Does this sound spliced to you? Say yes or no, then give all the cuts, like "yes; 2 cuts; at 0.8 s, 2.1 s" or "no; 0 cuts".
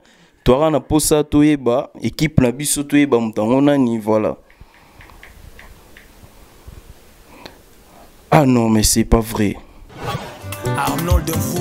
yes; 1 cut; at 9.9 s